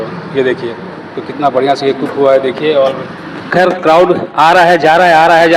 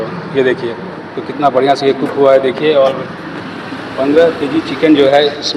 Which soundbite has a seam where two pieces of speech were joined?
first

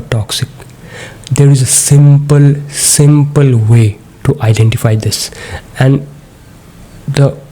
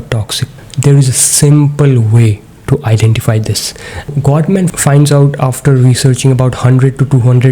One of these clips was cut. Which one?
second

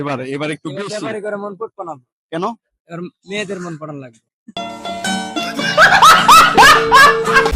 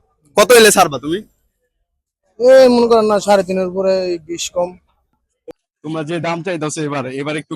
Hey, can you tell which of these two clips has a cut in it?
second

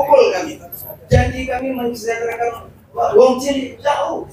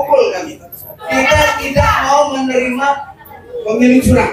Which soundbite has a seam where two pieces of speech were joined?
second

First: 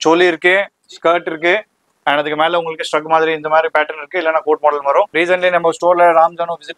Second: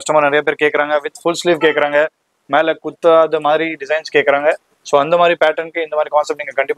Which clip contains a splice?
first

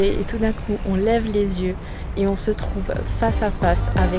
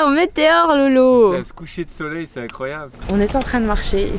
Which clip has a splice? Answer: second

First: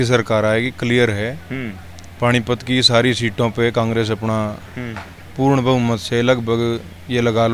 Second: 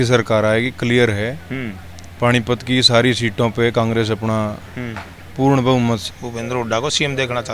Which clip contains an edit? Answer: second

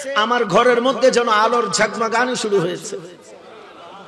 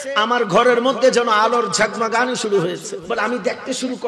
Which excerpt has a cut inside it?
second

